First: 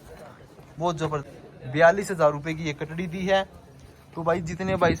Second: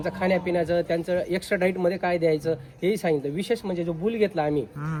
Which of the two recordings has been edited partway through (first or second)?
first